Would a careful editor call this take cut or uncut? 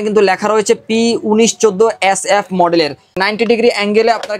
cut